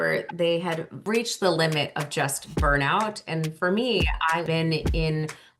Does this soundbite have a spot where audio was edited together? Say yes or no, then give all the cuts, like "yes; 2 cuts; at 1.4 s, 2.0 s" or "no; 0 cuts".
yes; 2 cuts; at 1.0 s, 4.4 s